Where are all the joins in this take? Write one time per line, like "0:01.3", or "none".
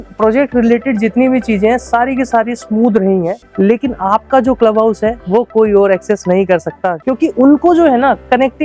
0:03.4
0:06.9